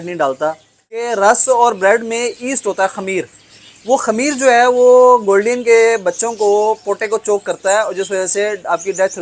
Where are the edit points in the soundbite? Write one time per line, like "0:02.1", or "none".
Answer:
0:01.1